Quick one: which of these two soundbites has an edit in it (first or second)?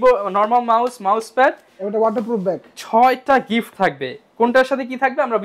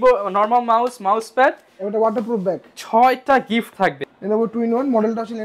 second